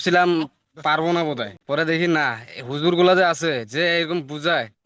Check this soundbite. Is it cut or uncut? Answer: uncut